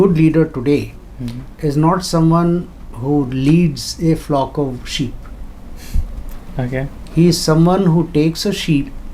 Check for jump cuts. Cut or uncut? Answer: uncut